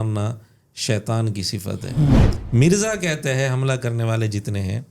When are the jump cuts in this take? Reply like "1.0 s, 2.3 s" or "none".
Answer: 2.3 s